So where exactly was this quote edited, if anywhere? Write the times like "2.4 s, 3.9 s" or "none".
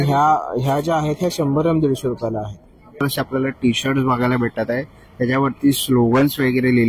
3.0 s